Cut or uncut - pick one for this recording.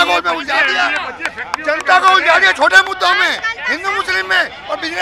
uncut